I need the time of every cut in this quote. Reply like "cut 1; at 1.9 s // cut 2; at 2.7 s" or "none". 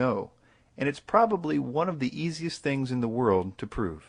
cut 1; at 2.2 s